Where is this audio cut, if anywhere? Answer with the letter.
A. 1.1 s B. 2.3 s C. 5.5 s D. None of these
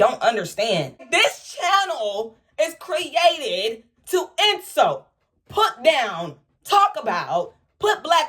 A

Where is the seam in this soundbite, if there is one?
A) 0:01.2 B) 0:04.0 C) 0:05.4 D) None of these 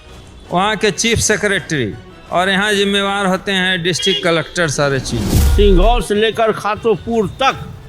C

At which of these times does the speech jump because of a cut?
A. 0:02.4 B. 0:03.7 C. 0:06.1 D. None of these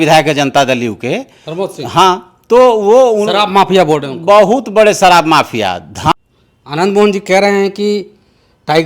C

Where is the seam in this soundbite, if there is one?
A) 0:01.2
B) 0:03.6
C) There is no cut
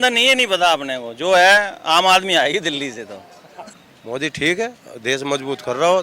B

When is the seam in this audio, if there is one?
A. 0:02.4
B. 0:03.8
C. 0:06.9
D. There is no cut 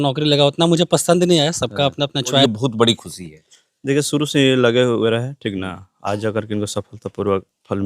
A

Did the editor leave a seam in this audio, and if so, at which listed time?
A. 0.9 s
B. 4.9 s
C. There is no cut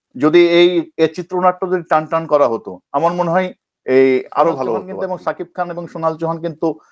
B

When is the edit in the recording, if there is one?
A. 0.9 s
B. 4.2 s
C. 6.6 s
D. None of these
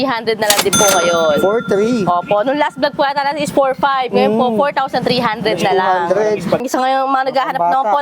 C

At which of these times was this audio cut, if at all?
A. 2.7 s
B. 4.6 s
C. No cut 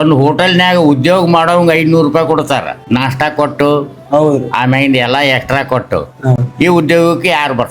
A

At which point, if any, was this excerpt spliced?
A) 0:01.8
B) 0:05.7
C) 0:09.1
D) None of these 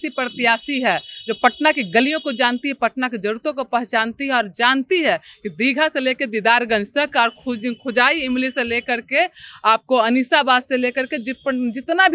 D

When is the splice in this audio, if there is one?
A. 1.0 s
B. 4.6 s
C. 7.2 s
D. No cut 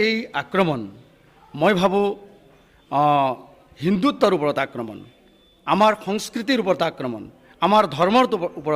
D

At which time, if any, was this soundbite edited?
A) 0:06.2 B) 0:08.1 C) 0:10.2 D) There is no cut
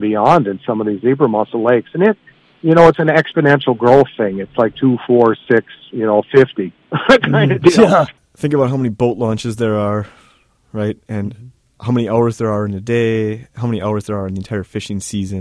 B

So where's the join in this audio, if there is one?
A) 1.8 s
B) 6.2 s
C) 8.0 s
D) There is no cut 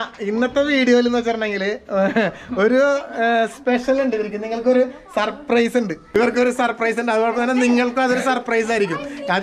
B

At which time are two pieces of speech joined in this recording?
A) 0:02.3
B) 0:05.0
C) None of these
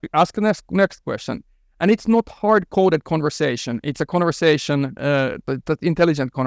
C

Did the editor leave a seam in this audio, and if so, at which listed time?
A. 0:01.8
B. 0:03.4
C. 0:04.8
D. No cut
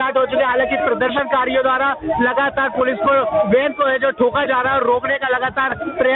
D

